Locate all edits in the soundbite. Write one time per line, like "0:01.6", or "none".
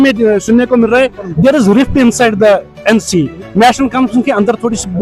none